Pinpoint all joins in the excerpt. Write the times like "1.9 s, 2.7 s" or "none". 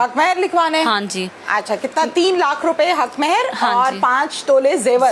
none